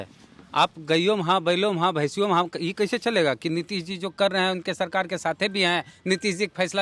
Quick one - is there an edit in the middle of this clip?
no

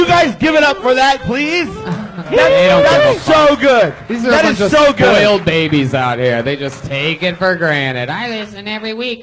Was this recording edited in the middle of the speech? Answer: no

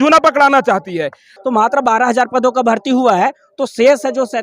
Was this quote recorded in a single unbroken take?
no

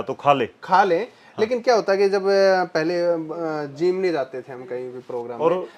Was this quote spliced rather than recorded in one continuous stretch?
no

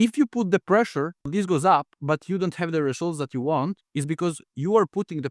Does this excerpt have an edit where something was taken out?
yes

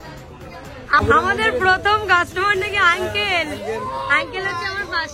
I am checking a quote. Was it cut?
yes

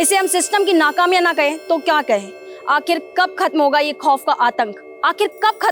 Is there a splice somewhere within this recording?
no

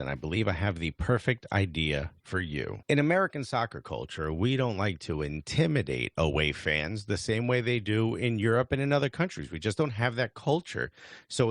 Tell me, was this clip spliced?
yes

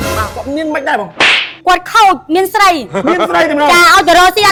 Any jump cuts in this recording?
no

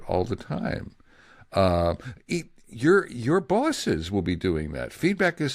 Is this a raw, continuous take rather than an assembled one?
yes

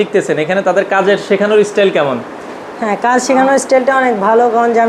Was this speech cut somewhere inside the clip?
no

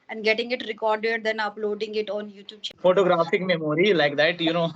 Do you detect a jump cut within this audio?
yes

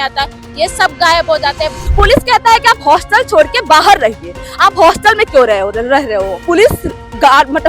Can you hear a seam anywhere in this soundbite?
yes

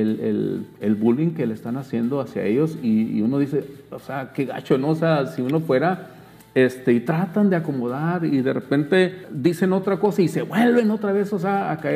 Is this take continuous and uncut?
yes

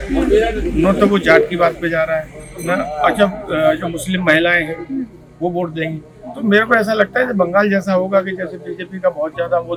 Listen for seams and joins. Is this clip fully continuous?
yes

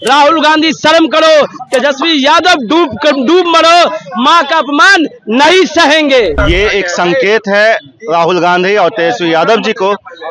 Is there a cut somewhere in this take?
yes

